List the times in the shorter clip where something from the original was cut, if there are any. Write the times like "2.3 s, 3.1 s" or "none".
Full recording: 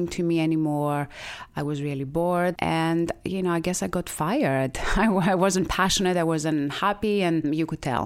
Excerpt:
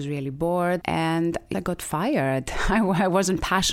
1.5 s